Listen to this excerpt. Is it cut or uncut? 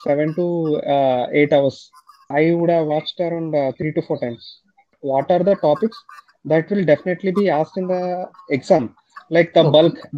cut